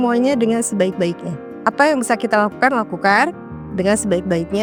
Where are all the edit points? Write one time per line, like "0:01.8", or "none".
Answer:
none